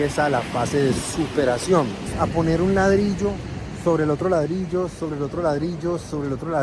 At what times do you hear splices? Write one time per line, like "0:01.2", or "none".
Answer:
0:02.1